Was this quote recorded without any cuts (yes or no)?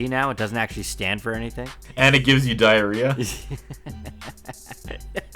no